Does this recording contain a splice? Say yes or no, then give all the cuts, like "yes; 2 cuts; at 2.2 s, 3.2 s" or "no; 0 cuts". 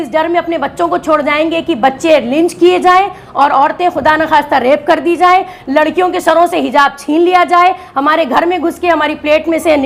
no; 0 cuts